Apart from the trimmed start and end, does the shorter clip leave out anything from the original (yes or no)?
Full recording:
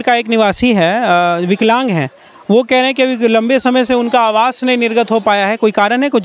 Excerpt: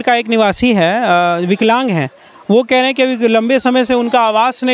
no